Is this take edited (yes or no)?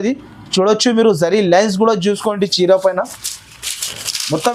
yes